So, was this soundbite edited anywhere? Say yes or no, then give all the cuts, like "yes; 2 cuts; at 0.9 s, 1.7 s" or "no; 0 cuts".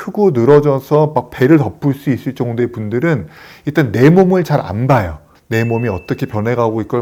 no; 0 cuts